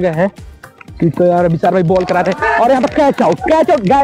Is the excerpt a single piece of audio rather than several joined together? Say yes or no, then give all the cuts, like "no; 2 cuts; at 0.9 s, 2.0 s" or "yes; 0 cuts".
yes; 0 cuts